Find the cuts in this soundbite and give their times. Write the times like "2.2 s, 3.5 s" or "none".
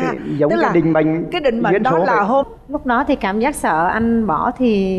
2.5 s